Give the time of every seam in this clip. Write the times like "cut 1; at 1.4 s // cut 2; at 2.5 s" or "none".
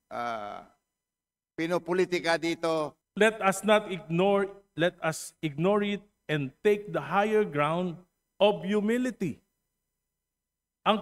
cut 1; at 3.0 s